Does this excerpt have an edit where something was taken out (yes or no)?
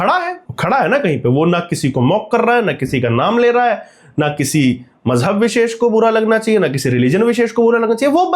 no